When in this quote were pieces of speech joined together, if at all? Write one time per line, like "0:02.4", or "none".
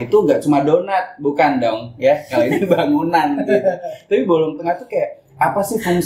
none